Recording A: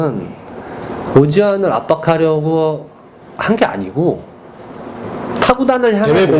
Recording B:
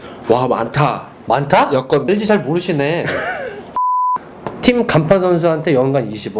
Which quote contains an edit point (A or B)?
B